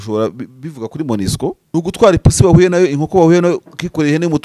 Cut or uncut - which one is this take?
cut